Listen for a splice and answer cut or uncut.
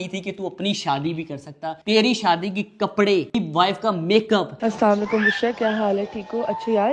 cut